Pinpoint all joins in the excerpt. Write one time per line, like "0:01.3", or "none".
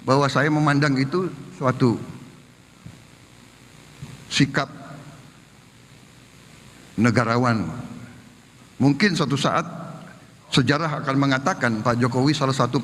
none